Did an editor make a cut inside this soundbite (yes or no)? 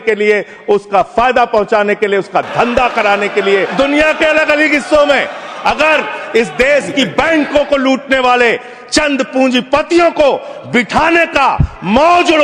yes